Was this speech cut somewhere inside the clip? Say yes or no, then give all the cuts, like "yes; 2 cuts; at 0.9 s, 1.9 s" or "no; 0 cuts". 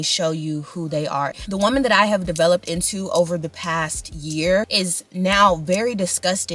yes; 2 cuts; at 1.4 s, 4.7 s